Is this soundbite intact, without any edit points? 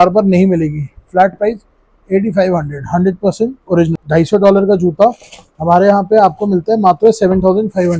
no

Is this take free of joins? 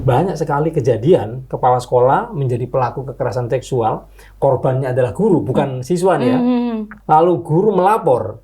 no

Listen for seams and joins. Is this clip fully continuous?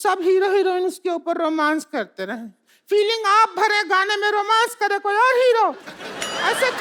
yes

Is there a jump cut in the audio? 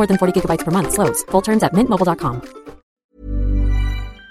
yes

